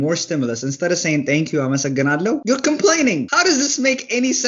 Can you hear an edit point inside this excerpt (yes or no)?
yes